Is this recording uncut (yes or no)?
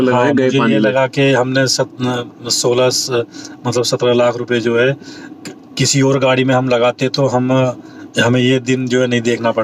yes